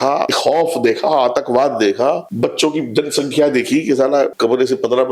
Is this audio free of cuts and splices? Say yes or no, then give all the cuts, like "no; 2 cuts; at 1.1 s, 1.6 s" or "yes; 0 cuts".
yes; 0 cuts